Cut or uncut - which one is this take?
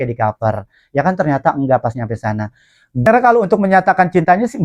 cut